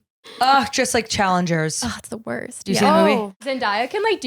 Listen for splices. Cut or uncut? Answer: cut